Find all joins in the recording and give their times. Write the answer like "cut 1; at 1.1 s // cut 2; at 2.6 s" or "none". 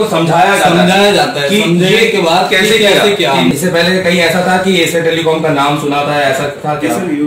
cut 1; at 3.5 s